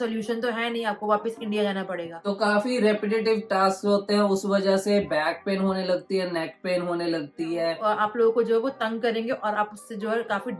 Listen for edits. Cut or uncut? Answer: cut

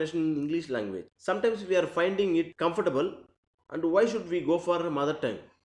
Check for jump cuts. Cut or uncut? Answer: uncut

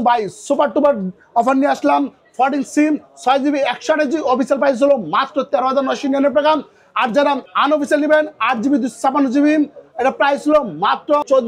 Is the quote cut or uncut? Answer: uncut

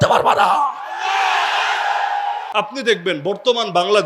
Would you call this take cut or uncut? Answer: cut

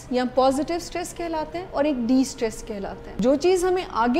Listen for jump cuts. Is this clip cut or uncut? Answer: cut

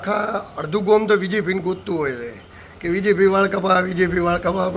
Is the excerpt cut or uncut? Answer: uncut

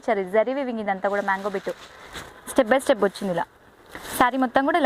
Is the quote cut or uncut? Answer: uncut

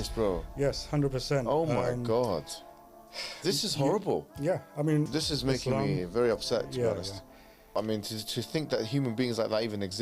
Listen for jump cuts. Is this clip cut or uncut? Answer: cut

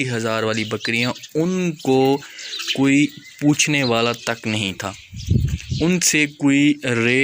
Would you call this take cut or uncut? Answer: uncut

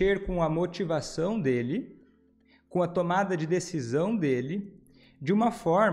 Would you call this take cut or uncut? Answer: uncut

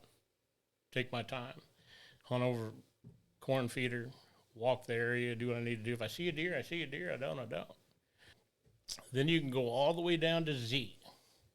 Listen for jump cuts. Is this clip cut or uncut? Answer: cut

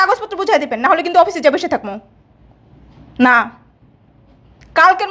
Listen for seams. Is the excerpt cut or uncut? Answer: uncut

